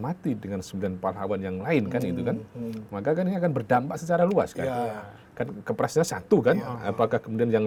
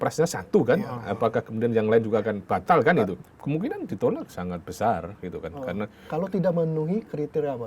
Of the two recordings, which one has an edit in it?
second; 1 cut; at 3.2 s

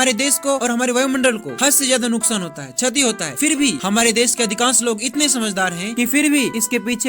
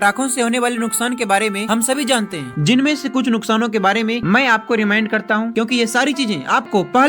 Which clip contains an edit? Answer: first; 1 cut; at 2.7 s

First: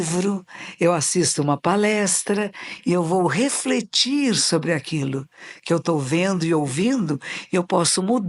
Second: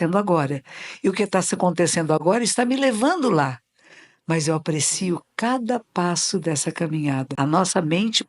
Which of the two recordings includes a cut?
second; 1 cut; at 7.3 s

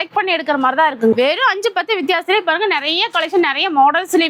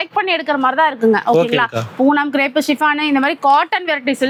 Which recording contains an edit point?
first; 1 cut; at 1.1 s

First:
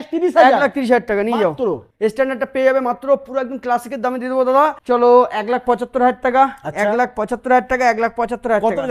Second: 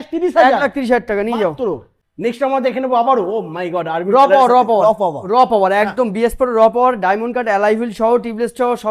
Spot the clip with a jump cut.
first; 2 cuts; at 1.9 s, 4.8 s

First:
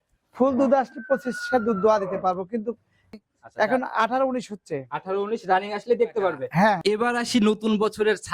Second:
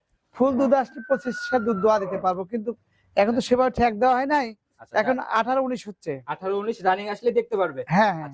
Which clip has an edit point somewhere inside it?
first; 2 cuts; at 3.1 s, 6.8 s

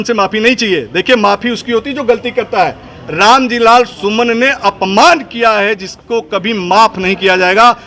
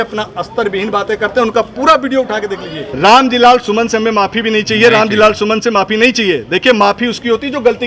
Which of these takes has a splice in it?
second; 1 cut; at 2.8 s

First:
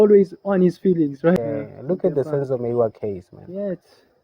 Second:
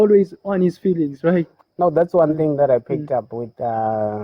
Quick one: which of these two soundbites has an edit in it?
first; 1 cut; at 1.4 s

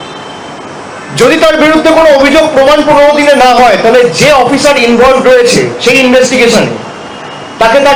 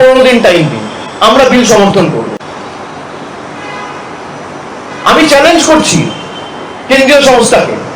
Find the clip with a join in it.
second; 1 cut; at 2.4 s

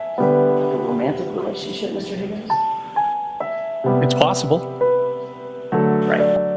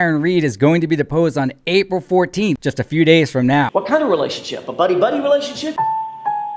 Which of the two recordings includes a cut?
second; 2 cuts; at 2.6 s, 3.7 s

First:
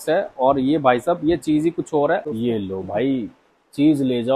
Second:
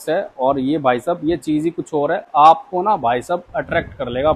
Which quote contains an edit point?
first; 1 cut; at 2.2 s

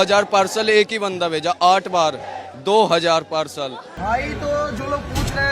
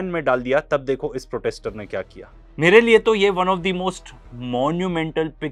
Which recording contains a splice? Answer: first; 1 cut; at 3.9 s

